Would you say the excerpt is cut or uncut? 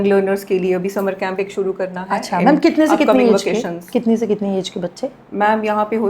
uncut